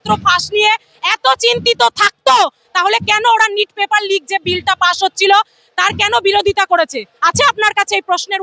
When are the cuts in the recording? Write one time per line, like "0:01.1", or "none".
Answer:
none